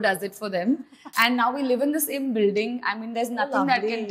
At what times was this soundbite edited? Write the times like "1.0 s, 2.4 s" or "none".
1.0 s